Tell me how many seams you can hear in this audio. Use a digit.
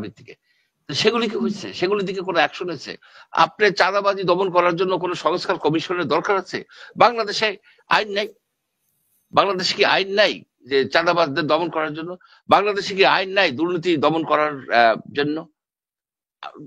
0